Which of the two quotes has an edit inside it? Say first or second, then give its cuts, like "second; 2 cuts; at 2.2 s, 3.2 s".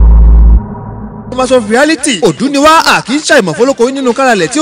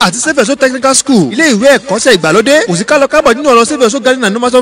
first; 1 cut; at 1.3 s